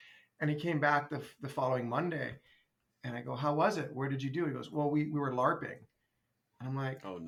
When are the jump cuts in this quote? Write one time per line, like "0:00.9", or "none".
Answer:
none